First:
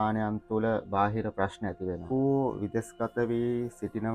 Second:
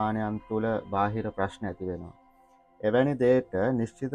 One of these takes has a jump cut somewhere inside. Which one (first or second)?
first